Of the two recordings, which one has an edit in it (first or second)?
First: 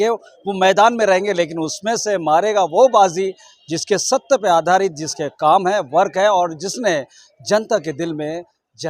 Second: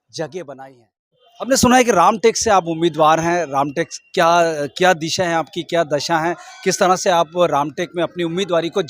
second